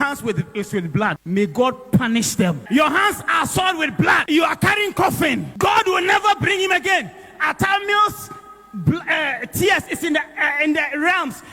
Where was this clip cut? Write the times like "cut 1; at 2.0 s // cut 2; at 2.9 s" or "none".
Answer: cut 1; at 1.2 s // cut 2; at 2.6 s // cut 3; at 4.2 s // cut 4; at 5.5 s